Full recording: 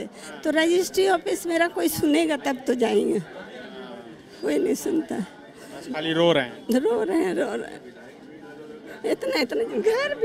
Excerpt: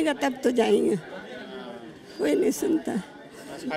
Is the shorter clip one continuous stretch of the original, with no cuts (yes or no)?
yes